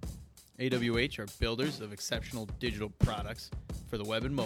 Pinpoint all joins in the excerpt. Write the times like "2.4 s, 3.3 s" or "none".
none